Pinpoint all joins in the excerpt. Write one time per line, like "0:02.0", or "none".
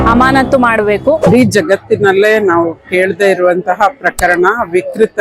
0:01.3